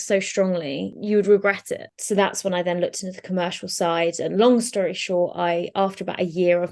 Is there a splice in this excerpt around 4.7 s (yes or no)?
no